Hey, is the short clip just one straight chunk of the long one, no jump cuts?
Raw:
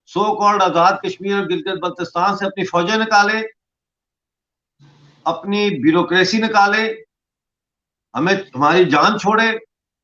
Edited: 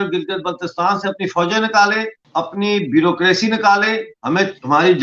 no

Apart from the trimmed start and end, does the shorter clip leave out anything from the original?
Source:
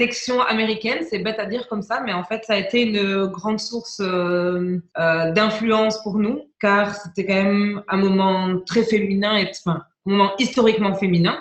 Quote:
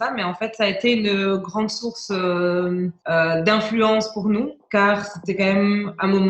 no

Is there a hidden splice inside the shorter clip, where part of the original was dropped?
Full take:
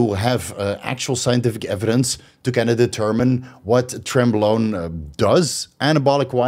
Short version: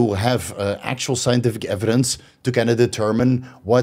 no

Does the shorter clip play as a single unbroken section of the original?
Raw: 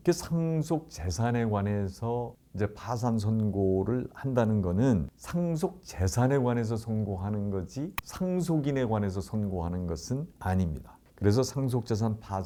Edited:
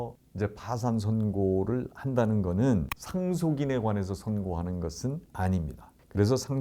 no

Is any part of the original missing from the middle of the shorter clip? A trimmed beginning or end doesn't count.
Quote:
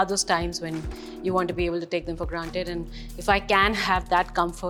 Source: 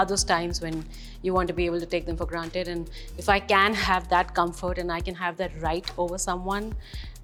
no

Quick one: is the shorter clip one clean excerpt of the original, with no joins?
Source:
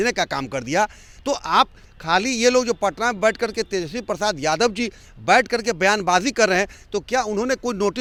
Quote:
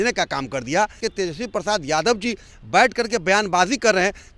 no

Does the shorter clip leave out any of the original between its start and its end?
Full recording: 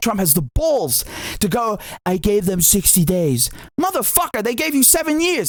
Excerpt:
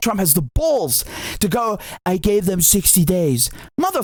no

